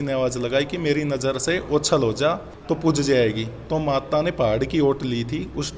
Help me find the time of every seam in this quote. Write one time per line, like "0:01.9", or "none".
none